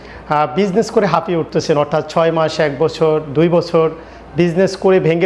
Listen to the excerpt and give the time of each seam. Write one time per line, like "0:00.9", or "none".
none